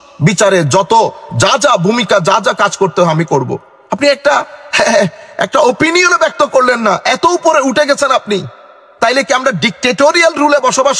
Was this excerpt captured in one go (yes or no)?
yes